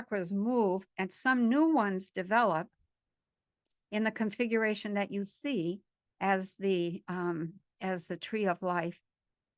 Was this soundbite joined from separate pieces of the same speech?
no; 0 cuts

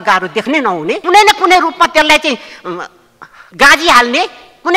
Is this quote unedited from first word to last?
no; 1 cut; at 1.0 s

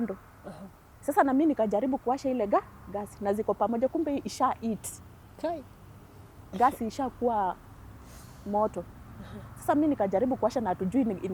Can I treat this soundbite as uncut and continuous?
yes; 0 cuts

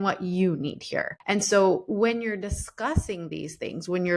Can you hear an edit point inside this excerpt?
yes; 1 cut; at 1.1 s

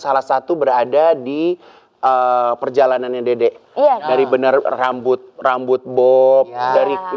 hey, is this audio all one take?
yes; 0 cuts

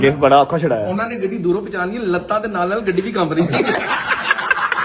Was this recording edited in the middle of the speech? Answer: yes; 1 cut; at 3.9 s

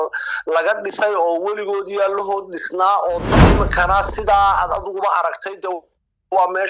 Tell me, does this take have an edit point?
yes; 1 cut; at 3.4 s

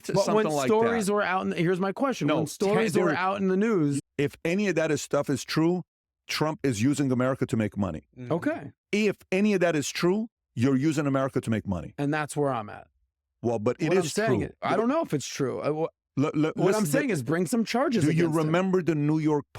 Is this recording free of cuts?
no; 1 cut; at 4.1 s

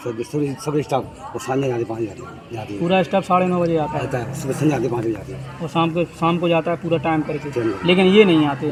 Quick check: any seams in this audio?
no; 0 cuts

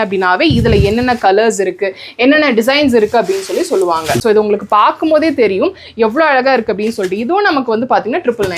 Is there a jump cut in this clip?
yes; 1 cut; at 4.2 s

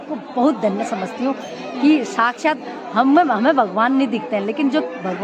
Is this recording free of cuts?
yes; 0 cuts

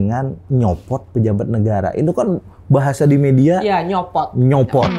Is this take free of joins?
yes; 0 cuts

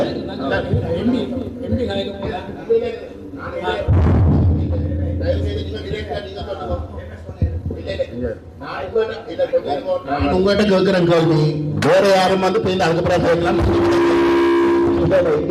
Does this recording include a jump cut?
no; 0 cuts

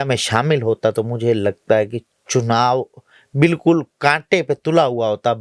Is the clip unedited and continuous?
yes; 0 cuts

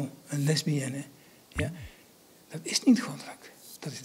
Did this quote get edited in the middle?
no; 0 cuts

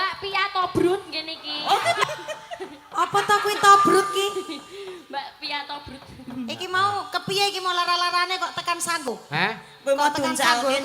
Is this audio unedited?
no; 2 cuts; at 2.0 s, 9.1 s

